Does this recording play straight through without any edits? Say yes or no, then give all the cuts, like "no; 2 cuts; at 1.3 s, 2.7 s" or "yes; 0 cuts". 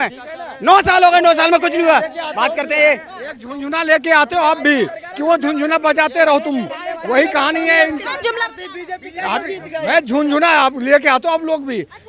yes; 0 cuts